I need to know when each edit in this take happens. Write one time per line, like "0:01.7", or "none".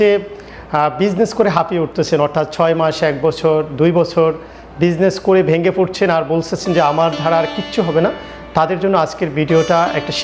none